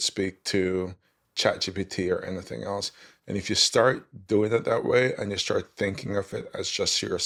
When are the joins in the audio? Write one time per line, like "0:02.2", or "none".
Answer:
none